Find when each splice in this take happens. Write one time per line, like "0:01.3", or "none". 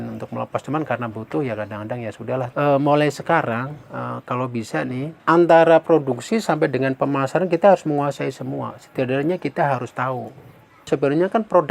0:02.5
0:05.1
0:10.9